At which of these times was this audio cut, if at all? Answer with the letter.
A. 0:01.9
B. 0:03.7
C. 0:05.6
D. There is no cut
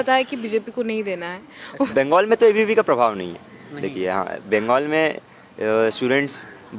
A